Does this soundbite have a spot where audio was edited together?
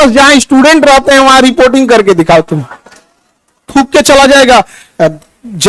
yes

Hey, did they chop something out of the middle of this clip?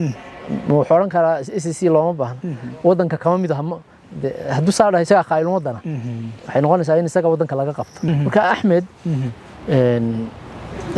yes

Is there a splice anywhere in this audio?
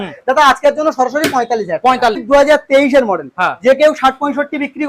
yes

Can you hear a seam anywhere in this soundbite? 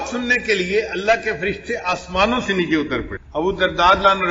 yes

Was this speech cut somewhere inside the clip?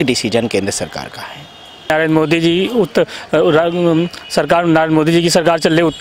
yes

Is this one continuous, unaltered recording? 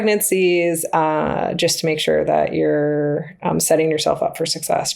yes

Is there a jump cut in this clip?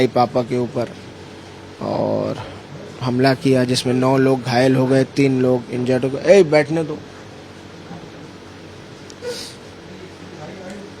no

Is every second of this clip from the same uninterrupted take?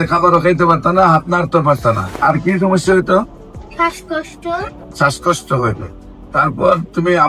no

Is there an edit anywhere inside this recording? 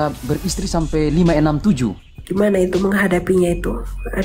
yes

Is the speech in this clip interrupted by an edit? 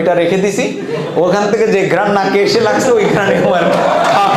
no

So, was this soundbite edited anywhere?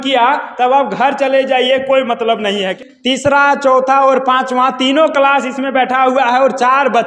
yes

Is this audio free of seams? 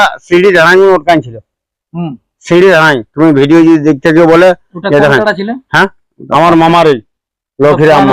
yes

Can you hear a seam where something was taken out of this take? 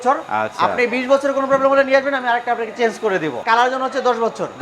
yes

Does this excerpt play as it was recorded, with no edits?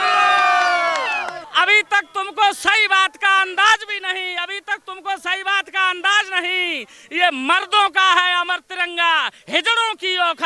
no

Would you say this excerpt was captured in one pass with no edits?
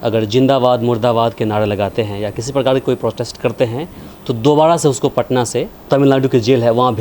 no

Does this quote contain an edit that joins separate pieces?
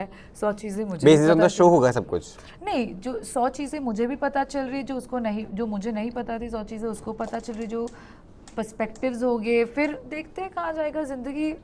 no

